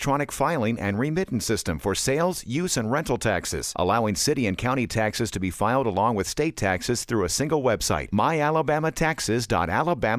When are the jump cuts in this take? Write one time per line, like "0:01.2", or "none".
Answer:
none

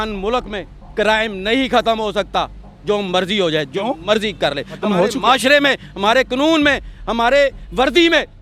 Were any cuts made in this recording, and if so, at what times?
none

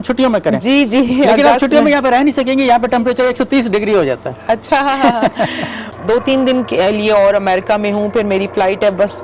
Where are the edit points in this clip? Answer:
none

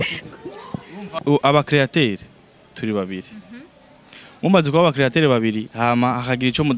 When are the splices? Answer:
0:01.2

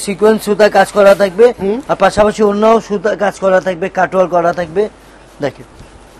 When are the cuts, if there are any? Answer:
none

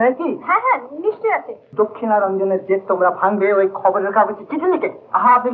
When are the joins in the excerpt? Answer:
0:01.6

